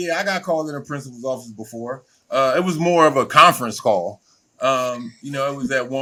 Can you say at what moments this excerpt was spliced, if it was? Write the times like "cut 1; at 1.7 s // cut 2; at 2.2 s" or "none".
none

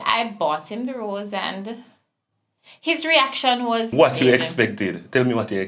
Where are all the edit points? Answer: cut 1; at 3.9 s

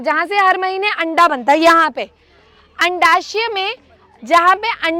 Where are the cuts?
none

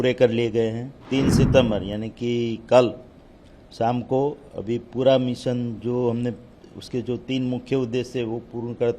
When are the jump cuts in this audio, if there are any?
cut 1; at 1.0 s

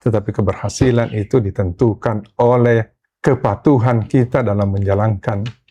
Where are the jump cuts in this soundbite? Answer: cut 1; at 3.0 s

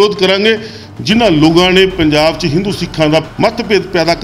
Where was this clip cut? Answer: cut 1; at 3.3 s

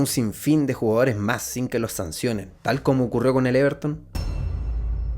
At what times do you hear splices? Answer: cut 1; at 4.2 s

